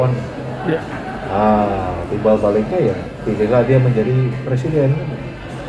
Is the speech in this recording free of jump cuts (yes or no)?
yes